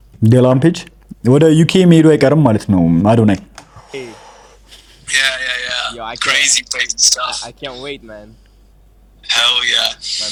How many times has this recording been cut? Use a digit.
0